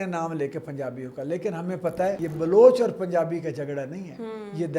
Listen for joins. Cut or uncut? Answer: cut